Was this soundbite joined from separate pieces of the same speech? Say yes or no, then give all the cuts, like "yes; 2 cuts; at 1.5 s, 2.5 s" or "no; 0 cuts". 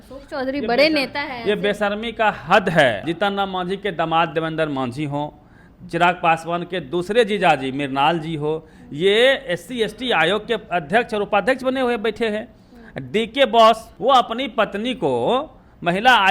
yes; 2 cuts; at 3.0 s, 13.9 s